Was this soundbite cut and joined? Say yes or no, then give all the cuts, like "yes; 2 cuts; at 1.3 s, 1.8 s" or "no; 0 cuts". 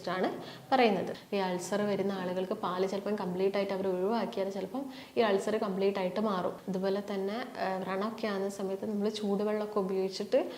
yes; 2 cuts; at 1.2 s, 6.6 s